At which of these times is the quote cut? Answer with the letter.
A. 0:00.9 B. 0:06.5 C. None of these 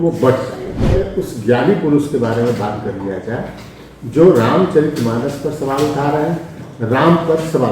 A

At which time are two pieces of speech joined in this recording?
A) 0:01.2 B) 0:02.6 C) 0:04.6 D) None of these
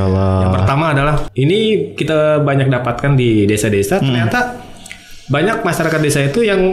A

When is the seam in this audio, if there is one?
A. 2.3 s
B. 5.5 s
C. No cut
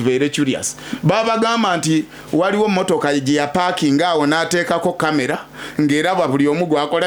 C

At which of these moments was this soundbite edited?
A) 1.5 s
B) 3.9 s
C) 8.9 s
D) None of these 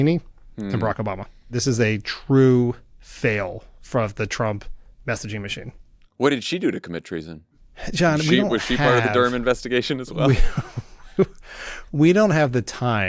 A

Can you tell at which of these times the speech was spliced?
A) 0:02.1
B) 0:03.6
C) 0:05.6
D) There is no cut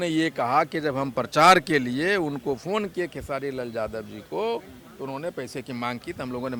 D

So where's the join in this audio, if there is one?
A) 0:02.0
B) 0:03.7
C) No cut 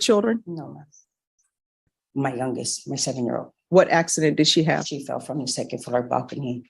A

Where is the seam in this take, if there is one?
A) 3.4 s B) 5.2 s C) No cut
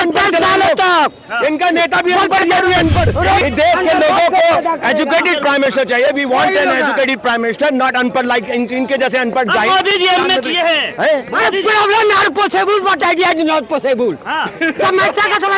A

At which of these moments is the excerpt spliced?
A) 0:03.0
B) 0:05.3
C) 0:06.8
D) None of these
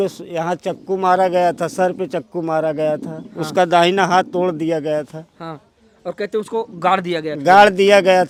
D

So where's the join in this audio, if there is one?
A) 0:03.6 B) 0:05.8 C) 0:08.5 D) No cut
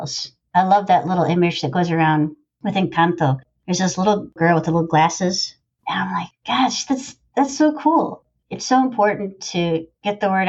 B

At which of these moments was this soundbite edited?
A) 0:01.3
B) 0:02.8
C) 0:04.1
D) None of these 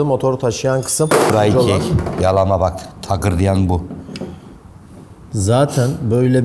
A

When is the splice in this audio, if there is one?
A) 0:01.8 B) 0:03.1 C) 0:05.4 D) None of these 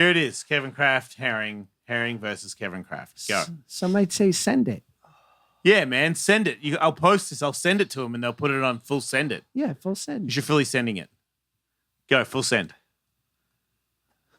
D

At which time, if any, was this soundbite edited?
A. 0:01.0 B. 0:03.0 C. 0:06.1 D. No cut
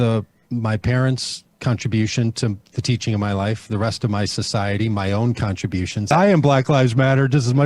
C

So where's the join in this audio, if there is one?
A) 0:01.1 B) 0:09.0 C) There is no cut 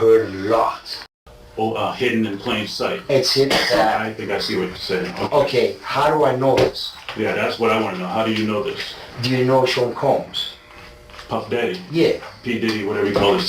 A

